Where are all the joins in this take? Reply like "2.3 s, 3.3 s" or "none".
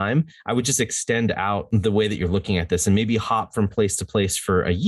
1.6 s